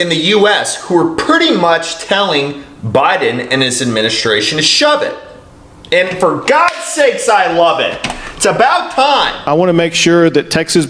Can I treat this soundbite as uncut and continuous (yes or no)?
no